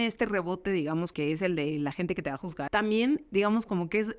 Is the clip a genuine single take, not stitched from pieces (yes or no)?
no